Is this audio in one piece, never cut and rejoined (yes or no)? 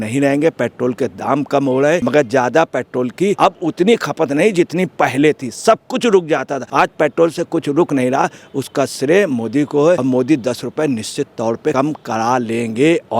no